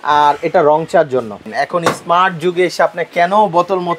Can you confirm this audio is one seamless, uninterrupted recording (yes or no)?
no